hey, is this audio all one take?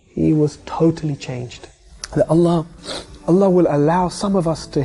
no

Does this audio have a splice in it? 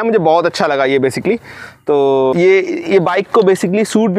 no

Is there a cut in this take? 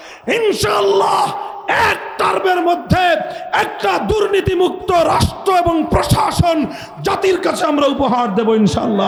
no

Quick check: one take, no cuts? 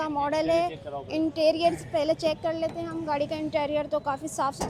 yes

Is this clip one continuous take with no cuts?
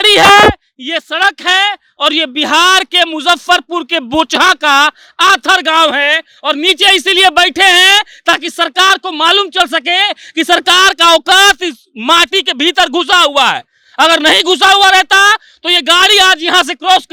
yes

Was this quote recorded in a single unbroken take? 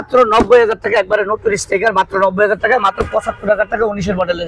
yes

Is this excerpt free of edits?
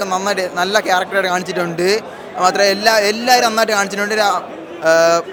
yes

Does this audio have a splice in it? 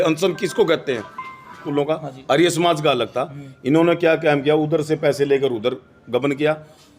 yes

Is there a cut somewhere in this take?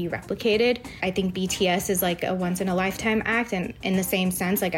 yes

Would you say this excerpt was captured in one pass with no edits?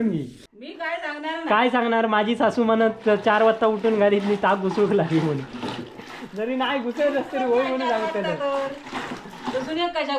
yes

